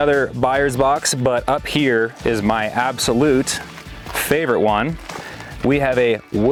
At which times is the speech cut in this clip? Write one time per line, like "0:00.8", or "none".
none